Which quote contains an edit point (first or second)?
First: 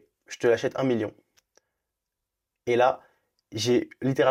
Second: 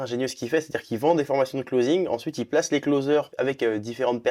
second